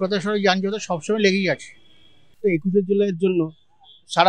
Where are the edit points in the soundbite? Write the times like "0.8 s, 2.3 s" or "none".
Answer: 2.4 s